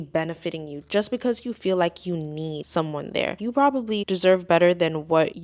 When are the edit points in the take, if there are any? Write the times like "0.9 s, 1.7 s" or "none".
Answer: none